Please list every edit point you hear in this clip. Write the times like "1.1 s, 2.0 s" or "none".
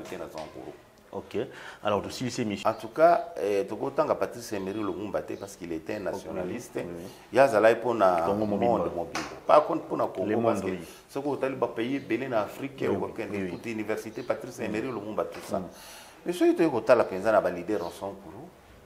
2.6 s